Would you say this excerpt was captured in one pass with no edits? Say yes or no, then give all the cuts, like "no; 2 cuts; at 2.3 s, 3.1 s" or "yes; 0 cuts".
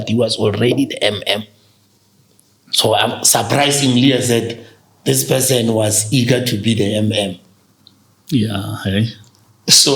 yes; 0 cuts